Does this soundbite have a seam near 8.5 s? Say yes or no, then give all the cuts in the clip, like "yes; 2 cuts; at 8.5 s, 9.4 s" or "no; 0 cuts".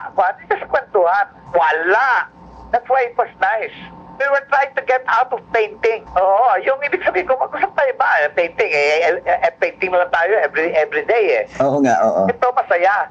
no; 2 cuts; at 1.4 s, 6.0 s